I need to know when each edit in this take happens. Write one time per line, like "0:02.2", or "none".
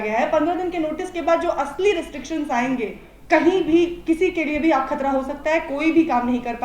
0:03.1